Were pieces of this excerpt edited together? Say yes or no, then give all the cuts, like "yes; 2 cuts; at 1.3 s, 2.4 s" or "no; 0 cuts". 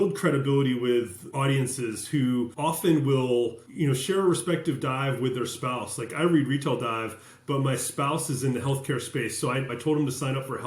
yes; 4 cuts; at 1.2 s, 2.5 s, 3.6 s, 9.7 s